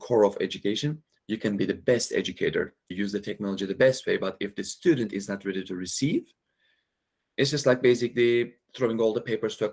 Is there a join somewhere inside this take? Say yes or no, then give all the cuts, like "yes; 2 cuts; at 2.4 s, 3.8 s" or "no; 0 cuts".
yes; 2 cuts; at 1.1 s, 2.9 s